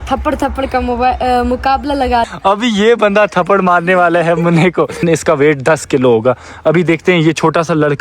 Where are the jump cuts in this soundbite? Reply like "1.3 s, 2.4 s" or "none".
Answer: 2.3 s, 5.0 s